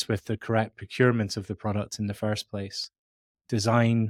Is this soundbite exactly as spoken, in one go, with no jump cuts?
yes; 0 cuts

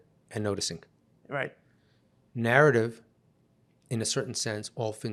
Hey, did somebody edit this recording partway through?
no; 0 cuts

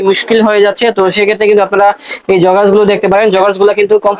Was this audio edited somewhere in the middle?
no; 0 cuts

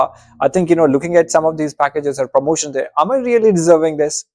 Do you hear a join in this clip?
no; 0 cuts

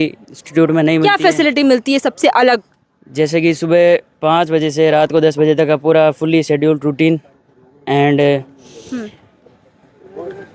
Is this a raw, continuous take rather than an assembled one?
yes; 0 cuts

